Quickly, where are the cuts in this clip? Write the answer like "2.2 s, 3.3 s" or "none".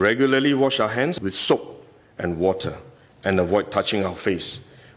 1.2 s